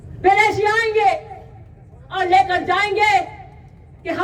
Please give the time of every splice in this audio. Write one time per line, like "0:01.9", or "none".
none